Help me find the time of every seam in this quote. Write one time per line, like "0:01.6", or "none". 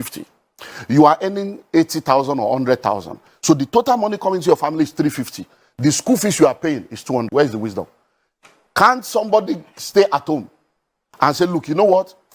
0:07.3